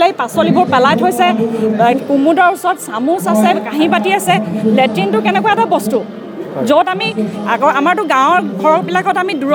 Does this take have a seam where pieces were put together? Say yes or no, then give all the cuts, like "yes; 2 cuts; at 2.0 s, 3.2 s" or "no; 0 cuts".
no; 0 cuts